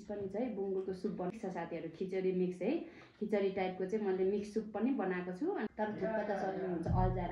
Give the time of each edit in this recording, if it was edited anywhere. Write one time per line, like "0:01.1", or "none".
0:01.3
0:05.7